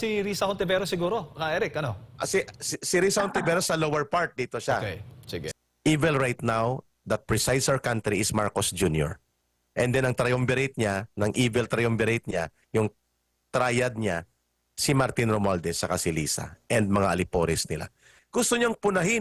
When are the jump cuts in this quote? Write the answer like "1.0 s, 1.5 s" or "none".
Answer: 5.4 s, 18.1 s